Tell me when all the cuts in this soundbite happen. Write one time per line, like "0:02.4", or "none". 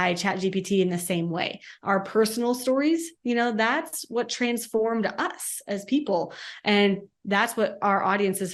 none